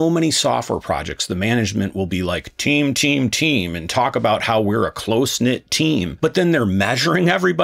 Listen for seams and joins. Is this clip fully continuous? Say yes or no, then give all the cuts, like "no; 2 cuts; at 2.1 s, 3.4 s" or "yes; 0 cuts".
yes; 0 cuts